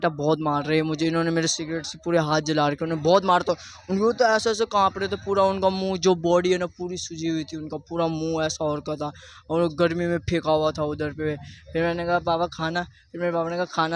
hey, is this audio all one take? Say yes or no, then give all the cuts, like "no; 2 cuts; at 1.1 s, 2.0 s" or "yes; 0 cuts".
yes; 0 cuts